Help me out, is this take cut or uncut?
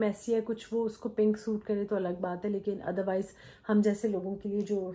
uncut